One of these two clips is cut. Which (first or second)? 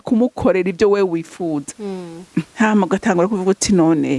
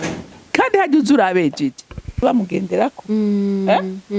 second